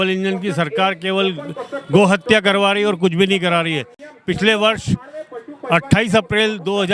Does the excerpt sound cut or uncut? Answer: uncut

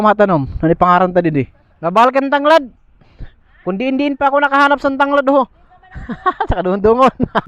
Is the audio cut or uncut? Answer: cut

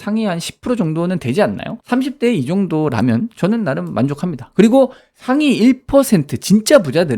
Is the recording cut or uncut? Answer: cut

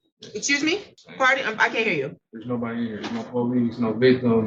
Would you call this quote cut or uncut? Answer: uncut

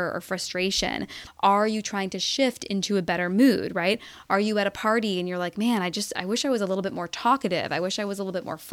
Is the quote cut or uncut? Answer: cut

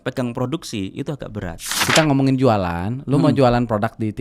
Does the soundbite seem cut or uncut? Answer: cut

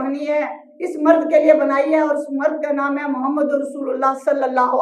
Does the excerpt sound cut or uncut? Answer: uncut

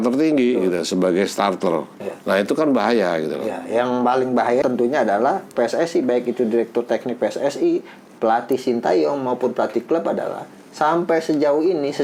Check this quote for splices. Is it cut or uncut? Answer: cut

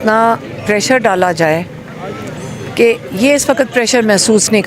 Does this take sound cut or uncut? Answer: uncut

